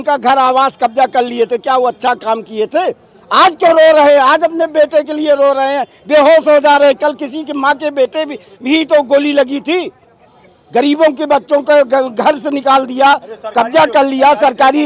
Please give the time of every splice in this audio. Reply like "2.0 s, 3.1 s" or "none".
none